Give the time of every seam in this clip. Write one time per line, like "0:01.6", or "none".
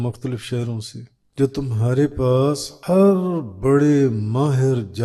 0:01.2
0:02.7